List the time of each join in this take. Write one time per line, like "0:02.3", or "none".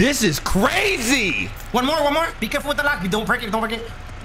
0:01.5